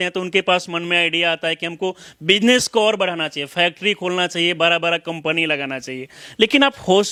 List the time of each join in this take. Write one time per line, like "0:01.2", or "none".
none

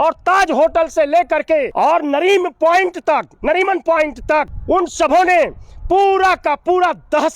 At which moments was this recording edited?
0:01.7
0:04.5

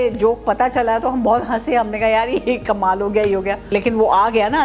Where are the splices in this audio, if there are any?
0:03.7

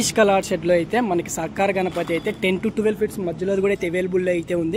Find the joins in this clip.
none

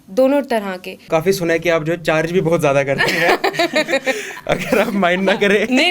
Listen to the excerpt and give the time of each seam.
0:01.0

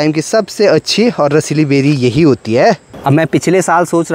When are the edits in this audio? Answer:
0:02.9

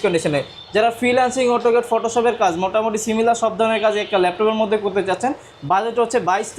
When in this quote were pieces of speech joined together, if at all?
none

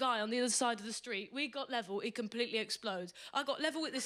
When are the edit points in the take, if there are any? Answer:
none

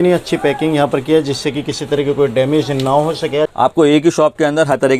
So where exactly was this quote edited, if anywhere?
0:03.5

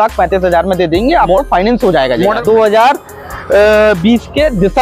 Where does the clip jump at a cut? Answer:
0:02.4

